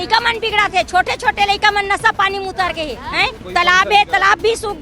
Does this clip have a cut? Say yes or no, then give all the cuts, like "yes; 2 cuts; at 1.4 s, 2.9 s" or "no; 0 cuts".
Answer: yes; 1 cut; at 3.5 s